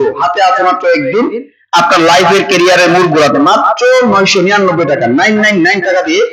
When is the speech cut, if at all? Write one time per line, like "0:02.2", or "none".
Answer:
none